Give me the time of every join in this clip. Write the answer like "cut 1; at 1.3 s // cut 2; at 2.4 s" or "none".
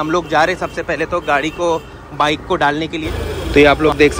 cut 1; at 3.2 s